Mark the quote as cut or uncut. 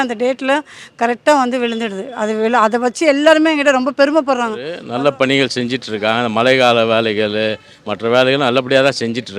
cut